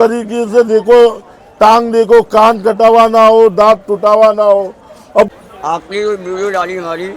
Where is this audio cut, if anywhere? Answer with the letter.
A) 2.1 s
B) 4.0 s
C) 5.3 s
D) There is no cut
C